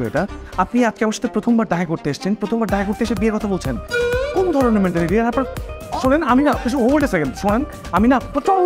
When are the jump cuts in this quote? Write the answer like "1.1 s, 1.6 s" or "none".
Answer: none